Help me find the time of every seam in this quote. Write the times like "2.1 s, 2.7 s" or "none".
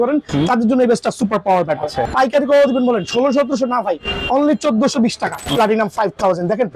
2.0 s, 5.4 s